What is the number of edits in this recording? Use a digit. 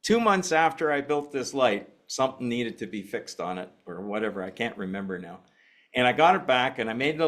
1